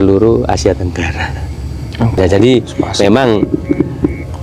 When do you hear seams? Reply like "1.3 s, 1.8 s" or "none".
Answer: 2.1 s

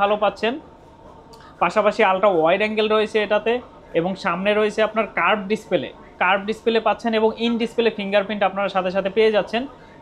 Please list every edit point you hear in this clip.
none

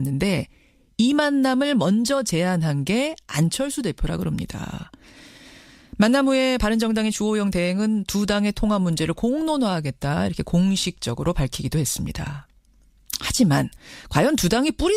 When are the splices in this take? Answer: 1.8 s

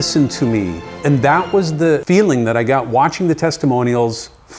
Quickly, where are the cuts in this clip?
0.9 s, 2.0 s

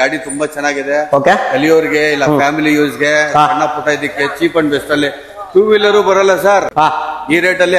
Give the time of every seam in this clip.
none

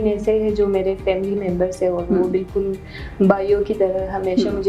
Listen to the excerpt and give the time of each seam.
none

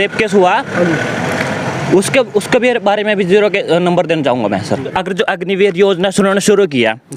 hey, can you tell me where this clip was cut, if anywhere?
4.9 s

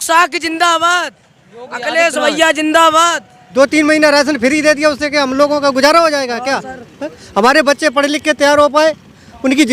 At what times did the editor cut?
3.4 s

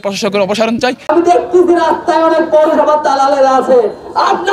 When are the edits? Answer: 1.1 s

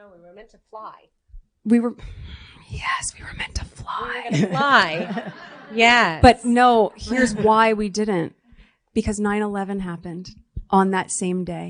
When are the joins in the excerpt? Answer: 10.7 s

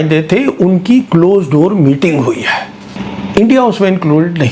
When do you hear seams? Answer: 3.0 s

